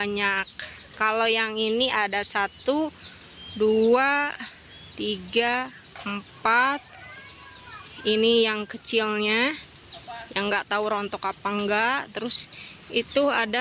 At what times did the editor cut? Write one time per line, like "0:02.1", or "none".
none